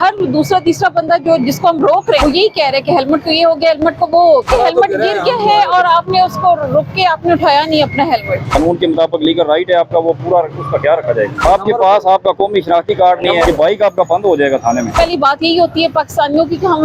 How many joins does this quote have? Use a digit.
6